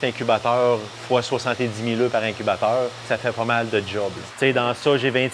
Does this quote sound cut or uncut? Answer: cut